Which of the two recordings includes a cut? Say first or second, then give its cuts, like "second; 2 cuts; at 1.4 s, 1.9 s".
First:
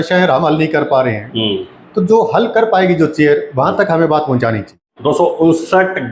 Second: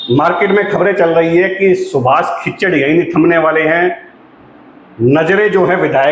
first; 1 cut; at 4.8 s